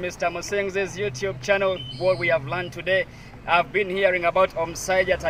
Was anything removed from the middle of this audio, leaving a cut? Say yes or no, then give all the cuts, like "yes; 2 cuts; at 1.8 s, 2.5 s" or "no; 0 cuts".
yes; 1 cut; at 1.9 s